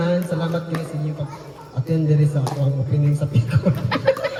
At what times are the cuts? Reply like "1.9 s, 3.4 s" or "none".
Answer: none